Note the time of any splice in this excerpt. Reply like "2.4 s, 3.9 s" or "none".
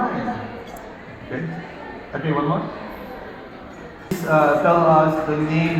4.2 s